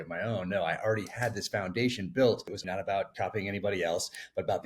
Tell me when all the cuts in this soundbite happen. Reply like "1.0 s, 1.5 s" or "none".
2.8 s